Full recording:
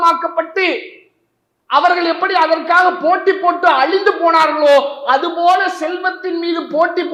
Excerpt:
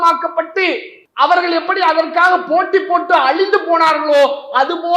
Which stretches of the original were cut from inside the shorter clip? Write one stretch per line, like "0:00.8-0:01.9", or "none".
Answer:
0:01.0-0:01.5